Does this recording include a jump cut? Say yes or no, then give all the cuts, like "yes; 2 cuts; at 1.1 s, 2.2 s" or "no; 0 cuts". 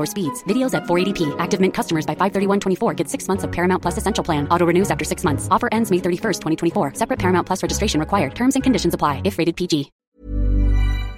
yes; 1 cut; at 10.0 s